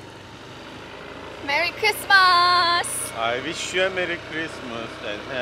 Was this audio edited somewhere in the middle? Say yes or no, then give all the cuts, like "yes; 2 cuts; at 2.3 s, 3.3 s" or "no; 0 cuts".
no; 0 cuts